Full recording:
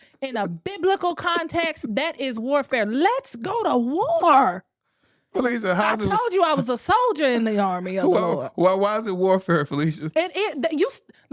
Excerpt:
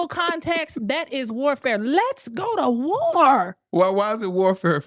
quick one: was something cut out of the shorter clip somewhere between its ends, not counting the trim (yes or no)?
yes